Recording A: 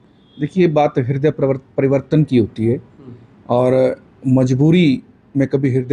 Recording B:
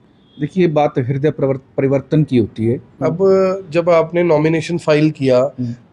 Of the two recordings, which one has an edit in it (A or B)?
B